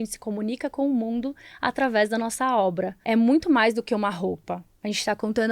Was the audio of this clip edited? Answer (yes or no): yes